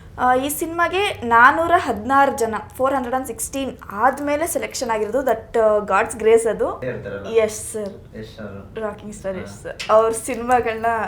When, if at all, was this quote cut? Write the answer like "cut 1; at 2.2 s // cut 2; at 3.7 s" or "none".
cut 1; at 6.9 s

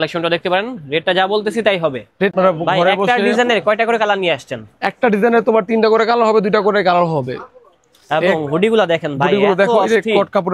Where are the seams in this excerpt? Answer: cut 1; at 2.3 s

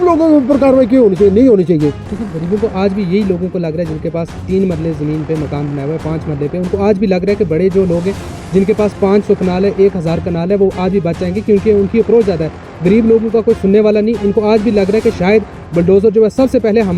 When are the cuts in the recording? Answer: cut 1; at 2.1 s

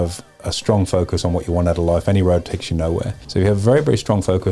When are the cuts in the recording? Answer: cut 1; at 3.2 s

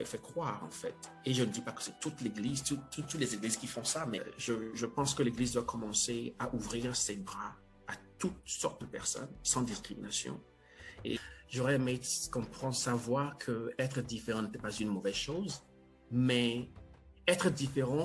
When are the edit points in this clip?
cut 1; at 4.3 s // cut 2; at 11.2 s

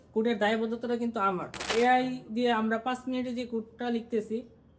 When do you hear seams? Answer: cut 1; at 1.7 s

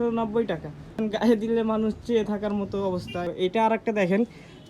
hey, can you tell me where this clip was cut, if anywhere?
cut 1; at 0.9 s // cut 2; at 3.2 s

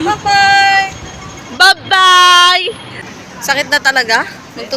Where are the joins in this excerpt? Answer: cut 1; at 3.0 s

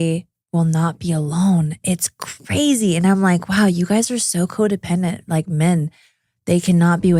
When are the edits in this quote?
none

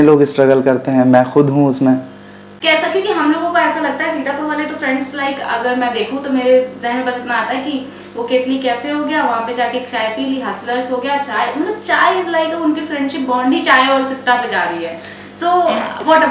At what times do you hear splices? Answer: cut 1; at 2.5 s

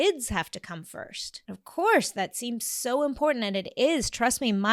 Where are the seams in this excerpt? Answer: cut 1; at 1.3 s

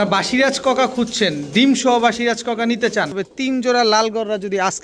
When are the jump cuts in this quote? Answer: cut 1; at 3.2 s

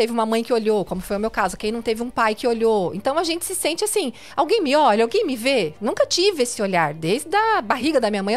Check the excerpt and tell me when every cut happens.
none

